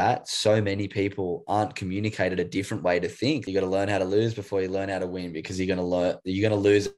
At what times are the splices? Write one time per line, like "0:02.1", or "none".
0:03.4